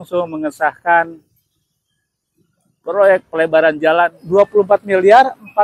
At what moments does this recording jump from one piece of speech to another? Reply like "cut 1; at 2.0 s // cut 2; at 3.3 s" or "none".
cut 1; at 4.2 s